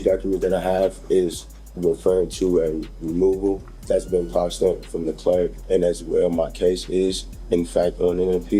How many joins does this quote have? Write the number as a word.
two